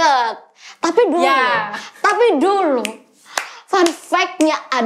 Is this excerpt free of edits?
yes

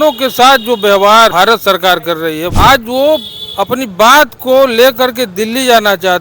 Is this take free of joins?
no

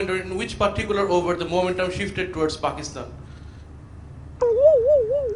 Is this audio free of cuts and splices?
no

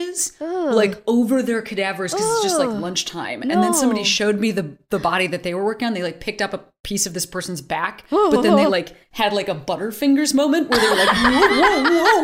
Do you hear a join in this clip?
no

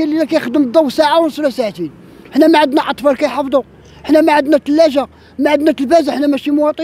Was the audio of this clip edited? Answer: no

